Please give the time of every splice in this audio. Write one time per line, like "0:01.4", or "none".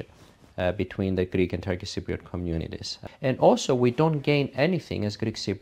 0:02.9